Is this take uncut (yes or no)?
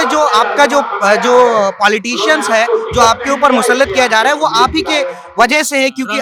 yes